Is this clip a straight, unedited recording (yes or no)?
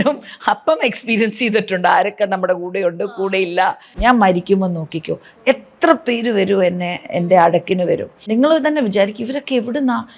no